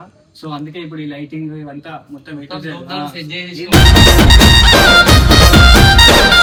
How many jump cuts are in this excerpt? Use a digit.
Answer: 0